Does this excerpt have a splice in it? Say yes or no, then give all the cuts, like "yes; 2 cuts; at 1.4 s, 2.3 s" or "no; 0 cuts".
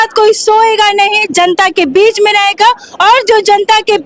no; 0 cuts